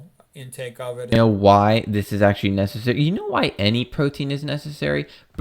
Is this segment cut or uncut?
cut